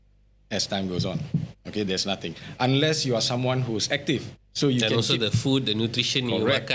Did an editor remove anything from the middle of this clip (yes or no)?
no